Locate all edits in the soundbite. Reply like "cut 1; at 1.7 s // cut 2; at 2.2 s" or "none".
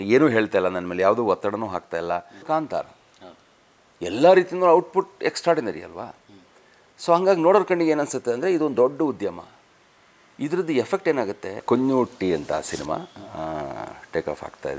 cut 1; at 2.4 s // cut 2; at 11.6 s